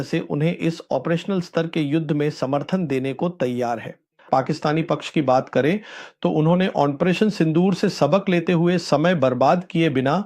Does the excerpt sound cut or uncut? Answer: cut